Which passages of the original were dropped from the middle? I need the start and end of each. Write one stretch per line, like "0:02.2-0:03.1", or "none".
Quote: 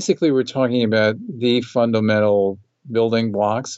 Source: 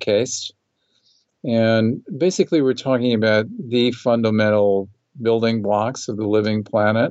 none